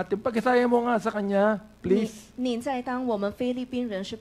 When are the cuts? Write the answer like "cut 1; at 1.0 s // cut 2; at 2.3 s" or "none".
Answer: none